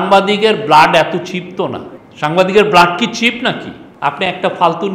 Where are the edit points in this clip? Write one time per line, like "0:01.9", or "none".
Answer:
0:03.8